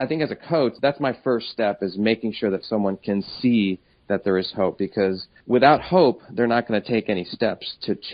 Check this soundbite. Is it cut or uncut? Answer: uncut